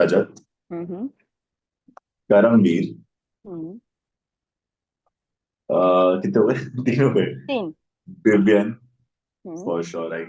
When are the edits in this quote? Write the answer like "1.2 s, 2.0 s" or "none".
none